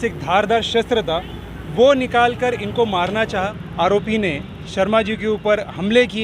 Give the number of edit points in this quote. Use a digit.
1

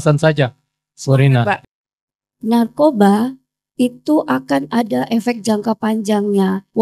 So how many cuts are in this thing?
1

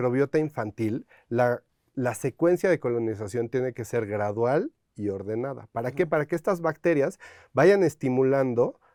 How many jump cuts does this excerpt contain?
0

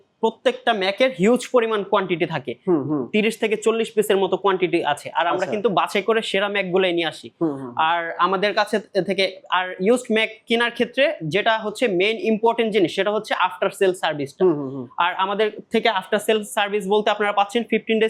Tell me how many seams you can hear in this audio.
0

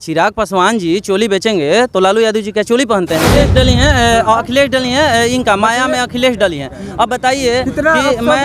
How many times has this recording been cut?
1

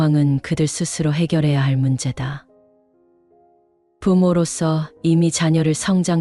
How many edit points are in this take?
2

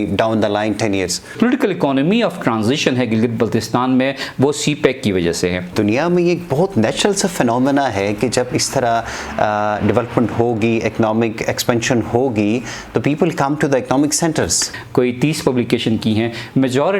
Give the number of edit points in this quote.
3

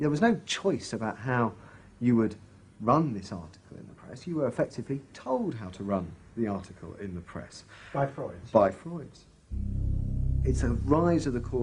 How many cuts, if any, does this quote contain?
0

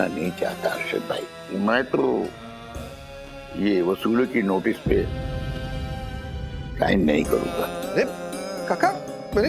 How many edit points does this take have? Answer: 4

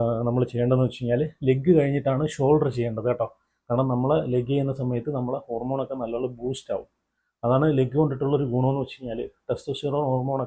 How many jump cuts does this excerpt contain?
0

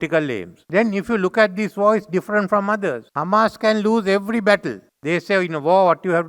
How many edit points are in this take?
0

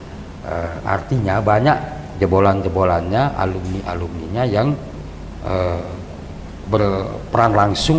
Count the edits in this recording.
0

